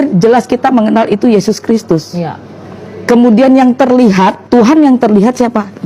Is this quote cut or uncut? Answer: cut